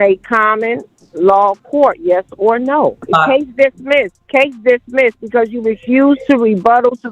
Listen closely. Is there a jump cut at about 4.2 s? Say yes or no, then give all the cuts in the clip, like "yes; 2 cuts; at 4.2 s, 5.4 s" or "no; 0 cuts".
yes; 2 cuts; at 3.0 s, 4.2 s